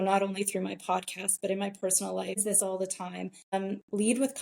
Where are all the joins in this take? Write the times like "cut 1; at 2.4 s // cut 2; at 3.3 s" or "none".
cut 1; at 2.4 s // cut 2; at 3.5 s

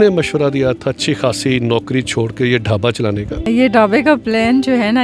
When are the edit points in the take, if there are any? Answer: cut 1; at 3.5 s

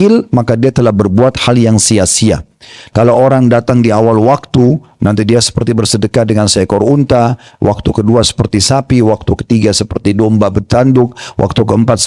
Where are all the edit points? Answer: cut 1; at 2.8 s

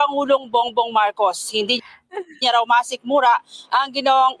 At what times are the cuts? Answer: cut 1; at 2.0 s

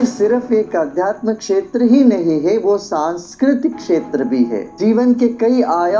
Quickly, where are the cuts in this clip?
cut 1; at 4.7 s

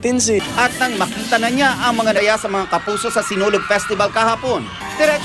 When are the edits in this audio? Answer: none

